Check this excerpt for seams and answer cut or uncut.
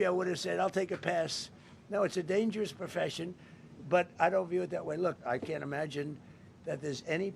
cut